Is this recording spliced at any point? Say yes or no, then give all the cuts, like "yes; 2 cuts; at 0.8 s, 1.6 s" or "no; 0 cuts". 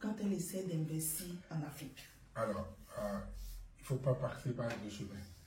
no; 0 cuts